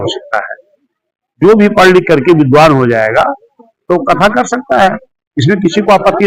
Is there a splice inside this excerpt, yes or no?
no